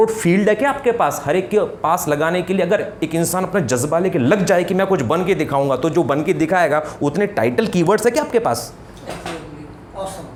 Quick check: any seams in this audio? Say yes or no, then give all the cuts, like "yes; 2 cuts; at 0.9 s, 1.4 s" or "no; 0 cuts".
no; 0 cuts